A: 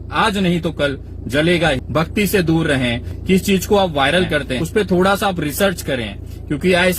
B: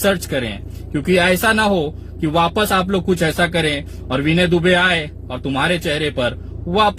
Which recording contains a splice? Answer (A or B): A